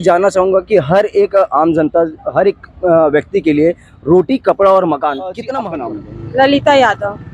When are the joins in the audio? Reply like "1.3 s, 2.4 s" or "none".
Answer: 5.5 s

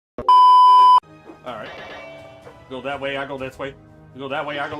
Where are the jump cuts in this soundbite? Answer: 1.0 s

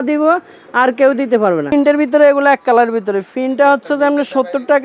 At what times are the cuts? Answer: 1.7 s

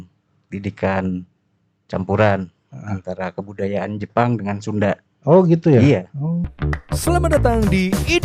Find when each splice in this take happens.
6.5 s

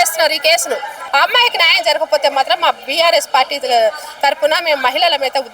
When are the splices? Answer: 1.0 s

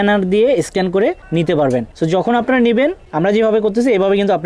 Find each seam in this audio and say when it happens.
1.2 s, 1.9 s, 3.0 s

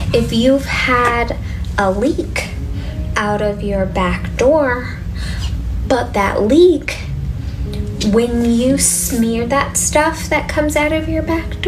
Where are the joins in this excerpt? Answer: none

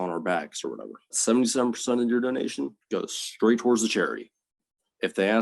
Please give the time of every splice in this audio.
1.2 s

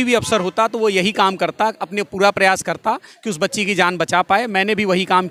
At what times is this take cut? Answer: none

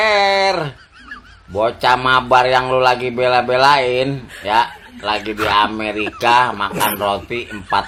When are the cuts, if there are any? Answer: none

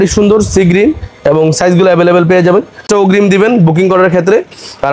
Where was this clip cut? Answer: 2.8 s

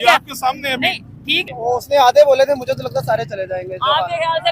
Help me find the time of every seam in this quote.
1.4 s

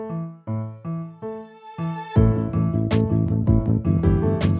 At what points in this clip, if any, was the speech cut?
2.1 s

